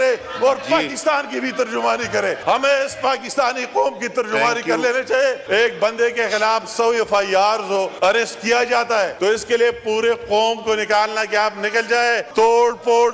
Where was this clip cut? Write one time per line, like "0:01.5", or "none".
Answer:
0:02.4
0:05.4
0:07.9
0:09.1
0:12.3